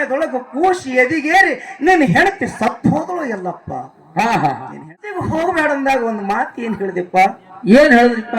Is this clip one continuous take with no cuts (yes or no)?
no